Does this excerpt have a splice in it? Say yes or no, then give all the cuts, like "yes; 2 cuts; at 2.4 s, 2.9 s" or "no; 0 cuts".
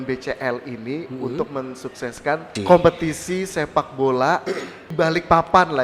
yes; 2 cuts; at 2.6 s, 4.9 s